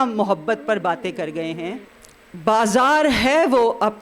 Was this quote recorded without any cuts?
no; 1 cut; at 1.8 s

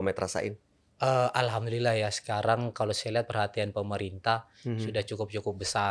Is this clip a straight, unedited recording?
yes; 0 cuts

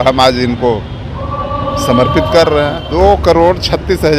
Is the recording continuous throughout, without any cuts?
no; 1 cut; at 2.8 s

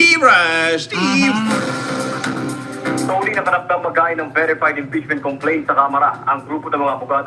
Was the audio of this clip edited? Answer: no; 0 cuts

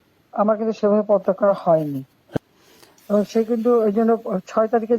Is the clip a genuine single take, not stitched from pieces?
no; 1 cut; at 2.2 s

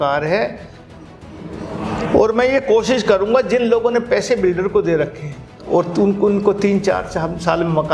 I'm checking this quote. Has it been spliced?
no; 0 cuts

